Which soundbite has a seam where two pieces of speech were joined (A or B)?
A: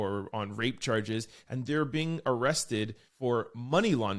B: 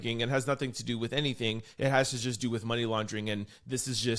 A